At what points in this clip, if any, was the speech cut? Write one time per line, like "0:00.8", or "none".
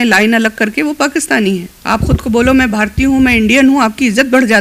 0:01.7